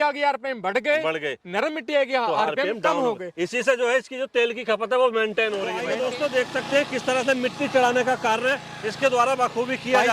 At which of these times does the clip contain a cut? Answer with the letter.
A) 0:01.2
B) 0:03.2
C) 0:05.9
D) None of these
C